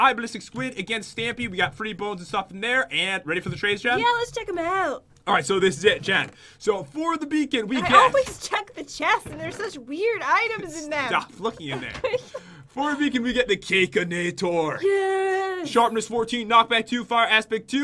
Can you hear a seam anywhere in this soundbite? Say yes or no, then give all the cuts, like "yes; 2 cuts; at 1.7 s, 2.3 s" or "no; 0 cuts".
yes; 1 cut; at 15.4 s